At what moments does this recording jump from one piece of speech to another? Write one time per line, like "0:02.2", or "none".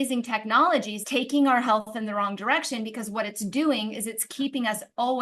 0:01.0